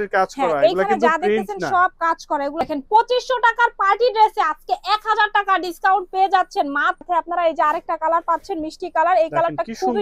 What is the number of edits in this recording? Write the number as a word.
two